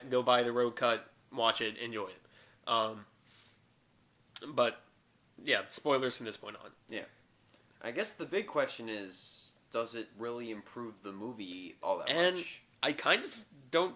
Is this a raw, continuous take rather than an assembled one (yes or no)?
no